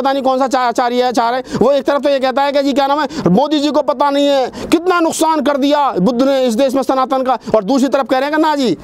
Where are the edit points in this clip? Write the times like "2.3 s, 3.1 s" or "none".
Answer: none